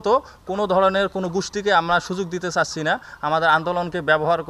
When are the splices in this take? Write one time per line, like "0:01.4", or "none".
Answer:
none